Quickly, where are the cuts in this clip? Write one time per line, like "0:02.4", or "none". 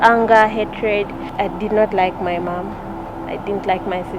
0:01.2